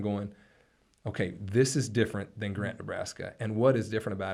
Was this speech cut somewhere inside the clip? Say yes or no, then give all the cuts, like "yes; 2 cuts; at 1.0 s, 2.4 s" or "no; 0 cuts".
no; 0 cuts